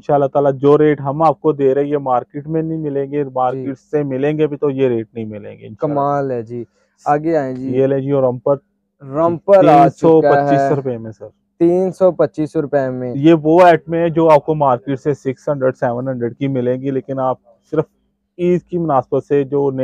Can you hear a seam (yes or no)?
no